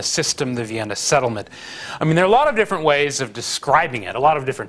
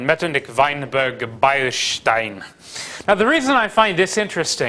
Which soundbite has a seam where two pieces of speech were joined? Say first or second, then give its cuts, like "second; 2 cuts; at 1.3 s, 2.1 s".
first; 1 cut; at 1.1 s